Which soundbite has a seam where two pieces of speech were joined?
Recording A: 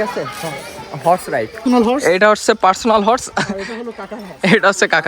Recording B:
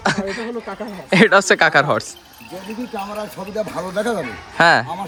A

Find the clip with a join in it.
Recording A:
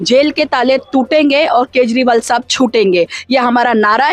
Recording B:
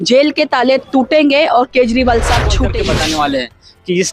B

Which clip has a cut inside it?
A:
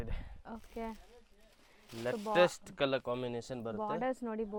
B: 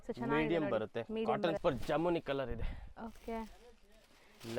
B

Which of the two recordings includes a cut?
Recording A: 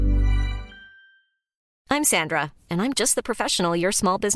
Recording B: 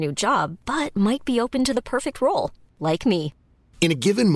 A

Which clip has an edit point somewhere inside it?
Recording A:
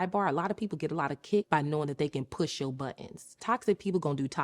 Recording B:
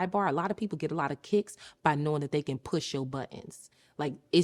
A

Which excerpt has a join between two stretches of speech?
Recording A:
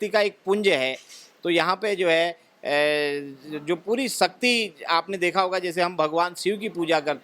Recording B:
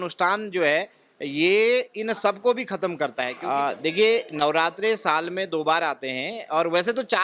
B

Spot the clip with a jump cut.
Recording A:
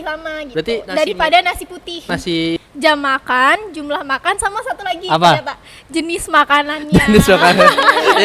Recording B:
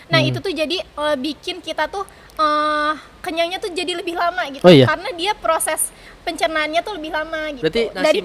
A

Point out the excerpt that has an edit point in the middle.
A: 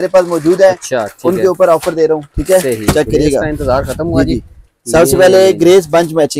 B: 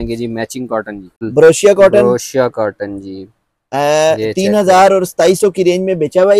B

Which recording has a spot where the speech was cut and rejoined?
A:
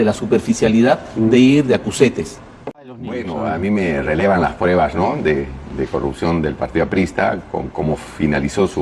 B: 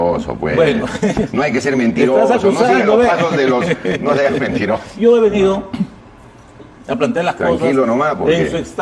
A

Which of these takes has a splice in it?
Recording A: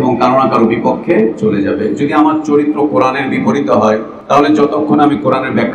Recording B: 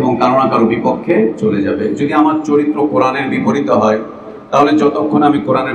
A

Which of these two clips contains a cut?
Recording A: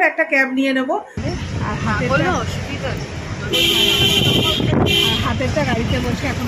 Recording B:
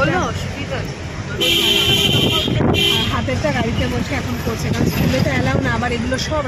A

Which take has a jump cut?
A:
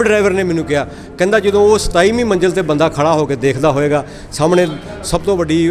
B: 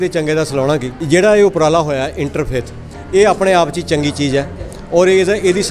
B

